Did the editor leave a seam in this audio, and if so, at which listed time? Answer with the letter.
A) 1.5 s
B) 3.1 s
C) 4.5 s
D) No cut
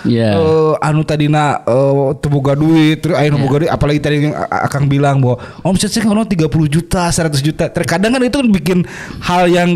D